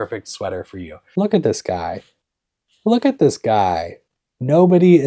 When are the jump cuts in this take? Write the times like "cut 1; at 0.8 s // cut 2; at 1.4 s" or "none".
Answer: cut 1; at 1.0 s